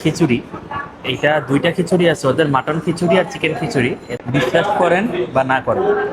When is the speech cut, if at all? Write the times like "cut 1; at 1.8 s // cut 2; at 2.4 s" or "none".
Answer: cut 1; at 4.1 s